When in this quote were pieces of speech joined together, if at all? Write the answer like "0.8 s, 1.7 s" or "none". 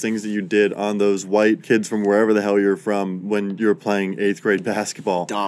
1.4 s, 3.3 s